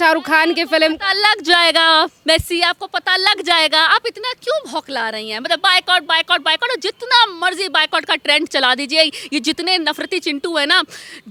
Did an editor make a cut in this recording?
no; 0 cuts

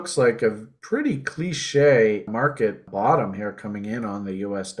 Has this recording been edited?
yes; 1 cut; at 2.4 s

